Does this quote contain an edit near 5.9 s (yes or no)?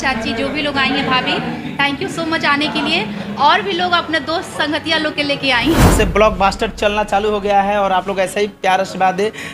yes